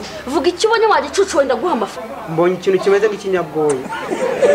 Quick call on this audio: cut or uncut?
cut